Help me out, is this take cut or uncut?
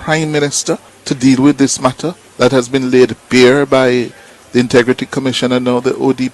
cut